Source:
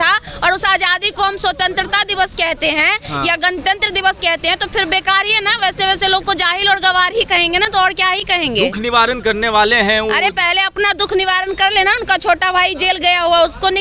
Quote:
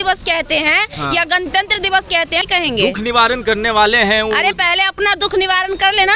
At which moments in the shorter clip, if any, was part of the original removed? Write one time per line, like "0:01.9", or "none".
0:02.5